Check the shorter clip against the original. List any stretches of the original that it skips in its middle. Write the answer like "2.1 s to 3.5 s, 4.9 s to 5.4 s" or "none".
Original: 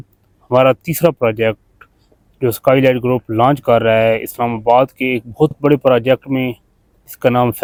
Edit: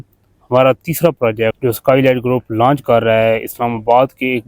1.6 s to 2.4 s